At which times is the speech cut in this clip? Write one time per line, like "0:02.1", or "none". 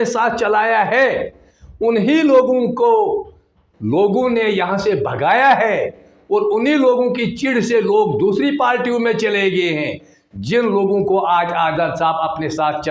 none